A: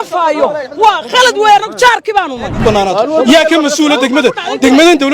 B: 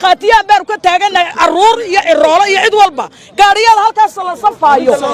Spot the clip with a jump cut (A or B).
A